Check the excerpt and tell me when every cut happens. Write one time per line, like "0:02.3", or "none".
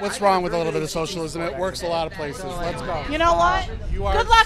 none